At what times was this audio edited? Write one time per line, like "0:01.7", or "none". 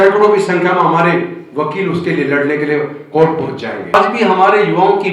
0:03.9